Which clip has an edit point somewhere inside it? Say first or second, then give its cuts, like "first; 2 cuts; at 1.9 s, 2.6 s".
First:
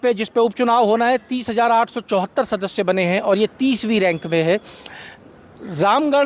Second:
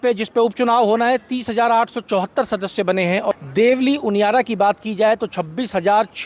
second; 1 cut; at 3.3 s